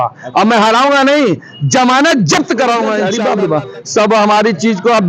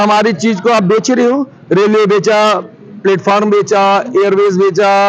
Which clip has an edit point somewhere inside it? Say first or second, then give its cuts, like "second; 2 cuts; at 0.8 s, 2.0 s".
first; 1 cut; at 3.1 s